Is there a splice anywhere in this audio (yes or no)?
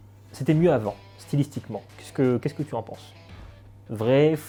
no